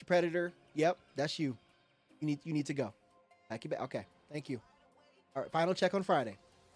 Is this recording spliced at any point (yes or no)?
no